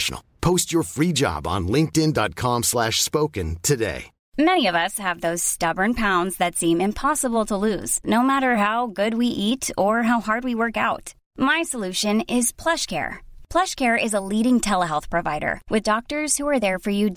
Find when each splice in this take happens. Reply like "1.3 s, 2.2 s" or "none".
4.2 s